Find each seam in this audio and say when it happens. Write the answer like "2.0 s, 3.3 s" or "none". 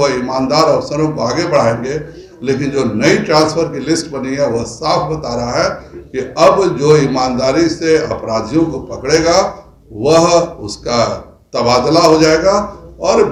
none